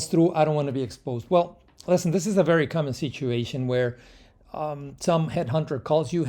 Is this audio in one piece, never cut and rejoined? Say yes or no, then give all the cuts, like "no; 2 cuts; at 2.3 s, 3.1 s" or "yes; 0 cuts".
yes; 0 cuts